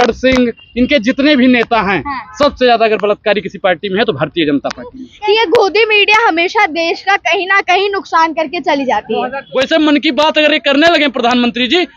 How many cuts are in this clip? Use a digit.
2